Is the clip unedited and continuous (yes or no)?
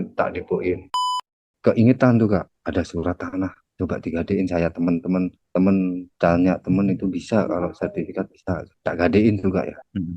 no